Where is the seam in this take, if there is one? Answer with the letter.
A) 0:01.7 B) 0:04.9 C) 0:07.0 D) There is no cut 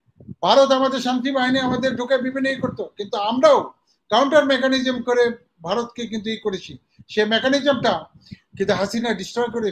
D